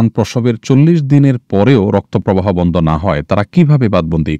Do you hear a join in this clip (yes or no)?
no